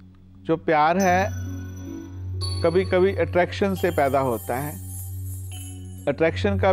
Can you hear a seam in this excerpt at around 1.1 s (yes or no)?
no